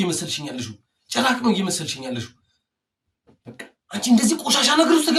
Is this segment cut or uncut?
uncut